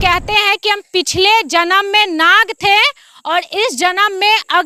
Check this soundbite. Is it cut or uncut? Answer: uncut